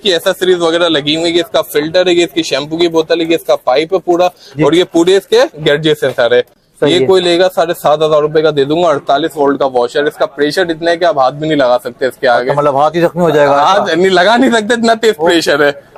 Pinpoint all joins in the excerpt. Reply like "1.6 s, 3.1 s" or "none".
none